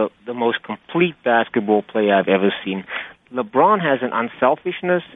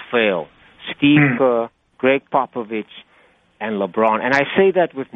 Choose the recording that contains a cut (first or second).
first